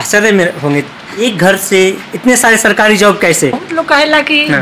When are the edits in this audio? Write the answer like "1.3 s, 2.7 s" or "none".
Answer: 1.2 s, 3.7 s